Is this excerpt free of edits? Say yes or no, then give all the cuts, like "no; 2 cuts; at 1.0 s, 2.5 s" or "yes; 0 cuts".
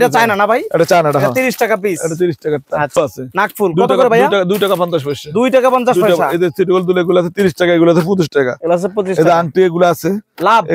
no; 1 cut; at 3.0 s